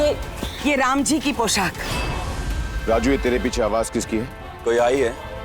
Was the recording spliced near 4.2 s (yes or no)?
no